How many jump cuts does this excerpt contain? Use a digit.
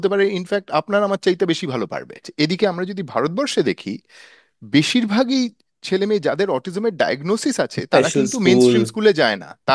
1